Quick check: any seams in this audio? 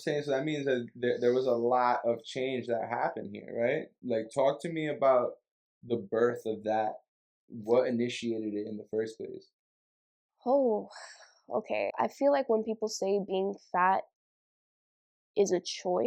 yes; 1 cut; at 12.0 s

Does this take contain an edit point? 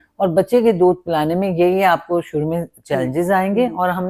no; 0 cuts

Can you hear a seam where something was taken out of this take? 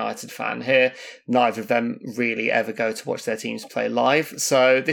no; 0 cuts

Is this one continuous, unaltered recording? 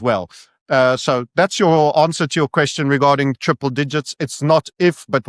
yes; 0 cuts

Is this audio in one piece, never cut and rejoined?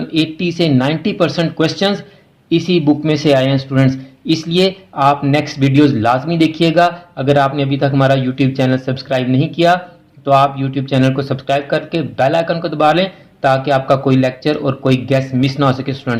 yes; 0 cuts

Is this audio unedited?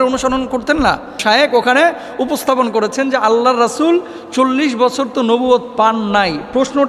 no; 1 cut; at 1.2 s

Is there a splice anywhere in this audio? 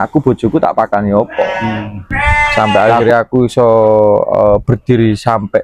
yes; 1 cut; at 2.5 s

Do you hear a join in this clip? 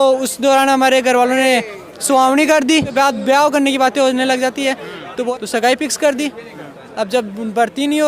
yes; 2 cuts; at 2.9 s, 5.3 s

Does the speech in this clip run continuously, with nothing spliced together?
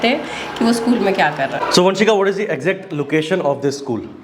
no; 1 cut; at 1.6 s

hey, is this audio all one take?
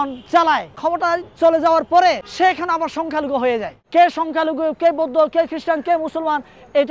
no; 3 cuts; at 0.8 s, 2.3 s, 3.8 s

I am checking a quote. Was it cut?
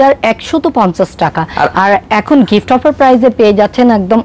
no; 0 cuts

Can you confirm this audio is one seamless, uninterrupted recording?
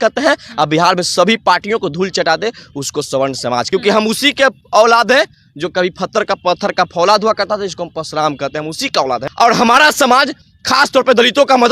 no; 2 cuts; at 3.7 s, 9.2 s

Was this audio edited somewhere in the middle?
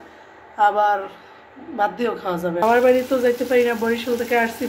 yes; 1 cut; at 2.6 s

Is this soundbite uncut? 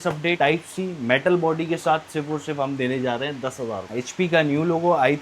no; 1 cut; at 3.9 s

